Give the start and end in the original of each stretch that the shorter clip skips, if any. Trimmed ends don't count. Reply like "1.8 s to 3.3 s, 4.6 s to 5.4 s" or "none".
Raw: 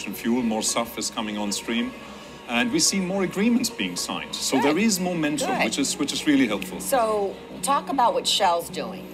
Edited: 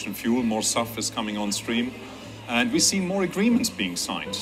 none